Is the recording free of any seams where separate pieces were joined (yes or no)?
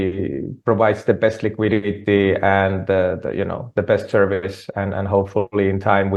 yes